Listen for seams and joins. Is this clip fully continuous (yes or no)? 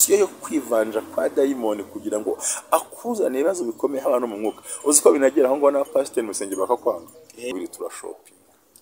no